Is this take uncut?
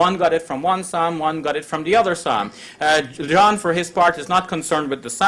no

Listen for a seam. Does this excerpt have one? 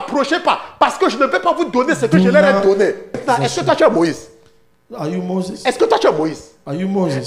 yes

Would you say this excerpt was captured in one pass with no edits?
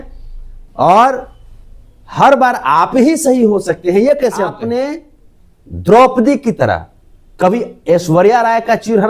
no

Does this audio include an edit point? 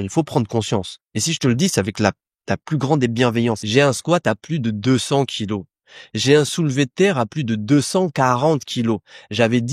yes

